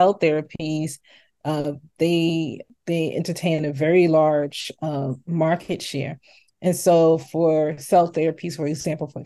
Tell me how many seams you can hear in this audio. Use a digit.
1